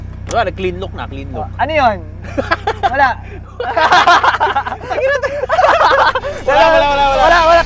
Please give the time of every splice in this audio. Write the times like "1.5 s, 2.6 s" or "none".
none

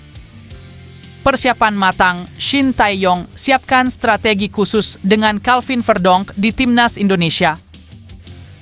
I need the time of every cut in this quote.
0.9 s, 7.6 s

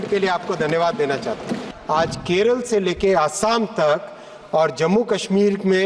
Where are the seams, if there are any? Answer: 1.7 s

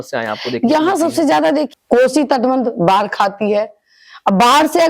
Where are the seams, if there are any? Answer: 1.7 s

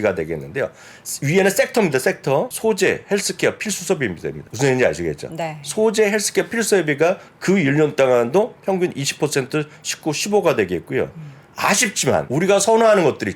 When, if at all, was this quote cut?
2.5 s, 4.4 s, 12.3 s

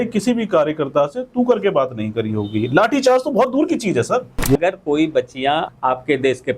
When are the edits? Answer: 4.4 s, 5.7 s

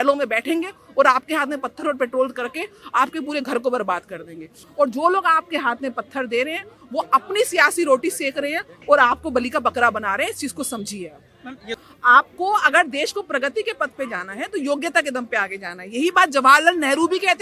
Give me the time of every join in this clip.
4.5 s, 11.7 s

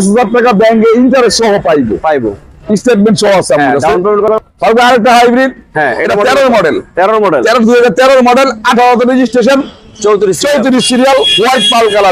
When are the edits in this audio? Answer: 4.3 s

